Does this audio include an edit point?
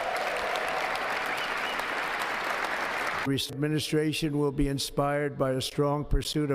yes; 1 cut; at 3.5 s

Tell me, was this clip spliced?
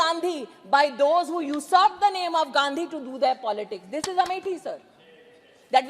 no; 0 cuts

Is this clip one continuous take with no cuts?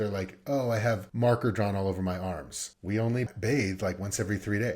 no; 2 cuts; at 1.1 s, 3.2 s

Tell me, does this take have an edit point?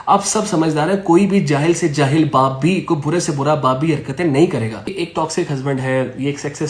yes; 1 cut; at 5.0 s

